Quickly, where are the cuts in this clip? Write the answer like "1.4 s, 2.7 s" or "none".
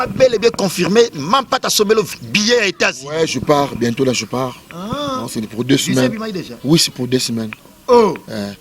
2.2 s